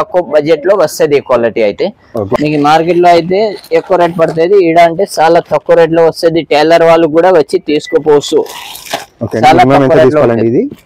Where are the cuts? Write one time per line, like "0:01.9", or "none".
0:02.3